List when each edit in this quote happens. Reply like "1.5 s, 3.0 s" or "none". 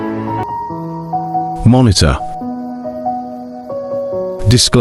none

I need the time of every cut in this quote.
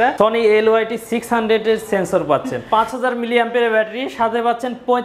2.5 s

